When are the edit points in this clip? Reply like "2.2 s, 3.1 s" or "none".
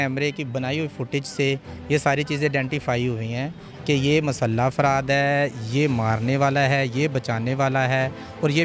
none

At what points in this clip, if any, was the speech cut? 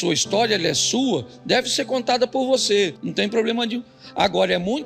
3.0 s

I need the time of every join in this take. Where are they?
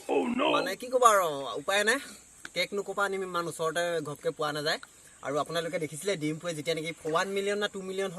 7.0 s

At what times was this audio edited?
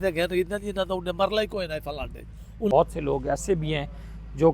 2.7 s

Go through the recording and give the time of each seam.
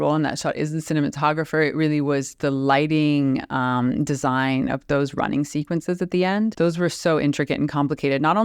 6.5 s

